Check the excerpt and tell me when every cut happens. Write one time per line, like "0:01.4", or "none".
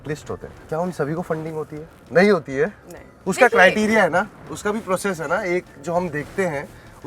none